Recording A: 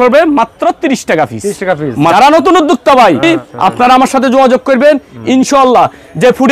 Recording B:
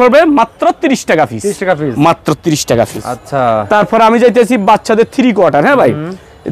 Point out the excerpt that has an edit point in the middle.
A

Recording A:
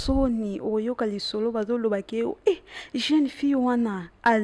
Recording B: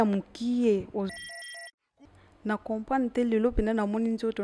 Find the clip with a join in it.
B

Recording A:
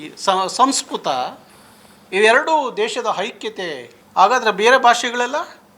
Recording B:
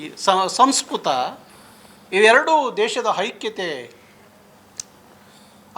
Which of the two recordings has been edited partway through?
A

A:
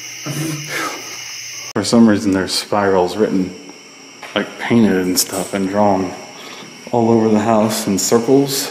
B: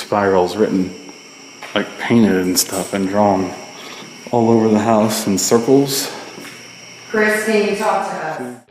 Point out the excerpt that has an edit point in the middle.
A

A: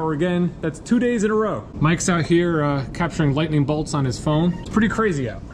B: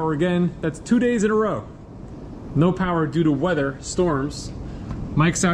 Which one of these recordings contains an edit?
A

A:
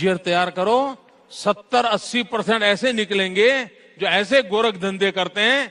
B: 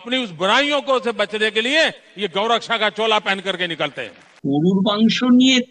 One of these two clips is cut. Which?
B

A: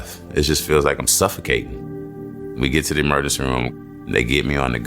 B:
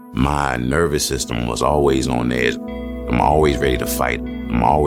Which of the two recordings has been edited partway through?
A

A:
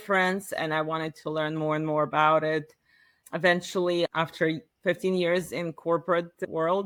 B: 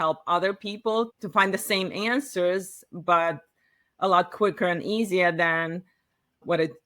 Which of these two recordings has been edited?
B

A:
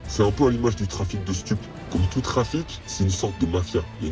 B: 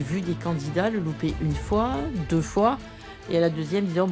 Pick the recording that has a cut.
A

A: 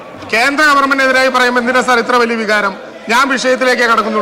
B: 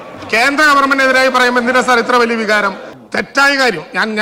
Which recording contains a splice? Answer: B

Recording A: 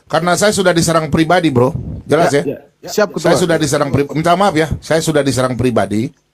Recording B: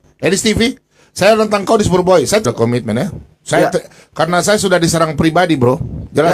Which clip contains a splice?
B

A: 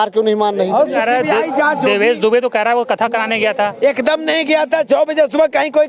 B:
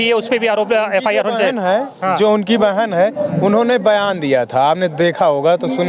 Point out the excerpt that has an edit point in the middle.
A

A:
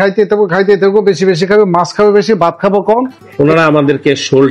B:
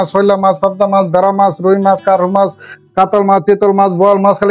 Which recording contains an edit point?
A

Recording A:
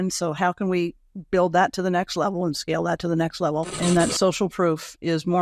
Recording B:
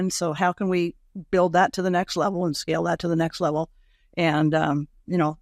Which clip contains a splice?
A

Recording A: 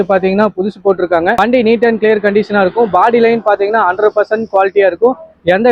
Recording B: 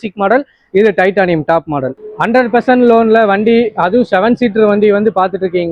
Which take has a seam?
B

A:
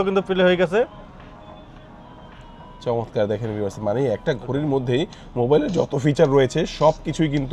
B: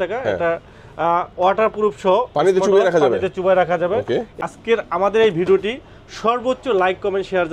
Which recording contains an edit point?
B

